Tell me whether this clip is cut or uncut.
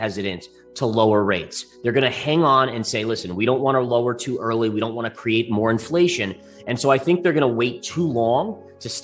uncut